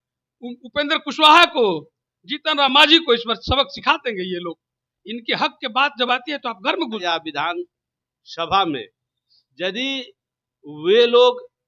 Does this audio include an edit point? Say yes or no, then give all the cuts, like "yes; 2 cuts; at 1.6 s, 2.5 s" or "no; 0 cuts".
yes; 1 cut; at 7.0 s